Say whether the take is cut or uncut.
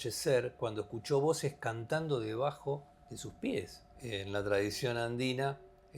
cut